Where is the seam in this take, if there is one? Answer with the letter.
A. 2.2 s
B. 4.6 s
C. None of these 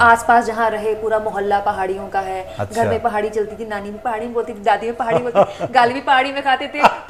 C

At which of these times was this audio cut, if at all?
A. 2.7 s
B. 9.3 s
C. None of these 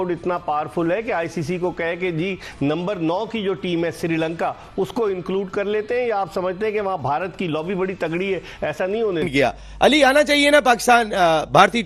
B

